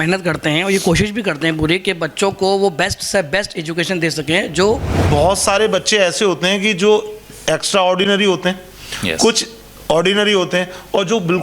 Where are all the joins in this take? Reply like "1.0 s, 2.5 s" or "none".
5.0 s